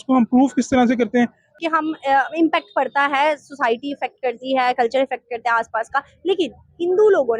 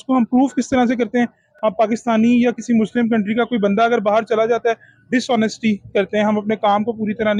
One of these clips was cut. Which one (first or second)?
first